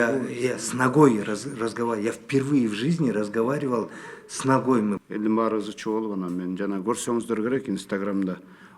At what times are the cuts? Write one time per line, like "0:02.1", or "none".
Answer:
0:05.0